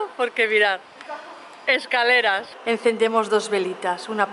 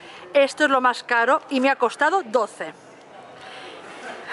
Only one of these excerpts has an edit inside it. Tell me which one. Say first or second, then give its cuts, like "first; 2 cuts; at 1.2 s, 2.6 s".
first; 1 cut; at 2.5 s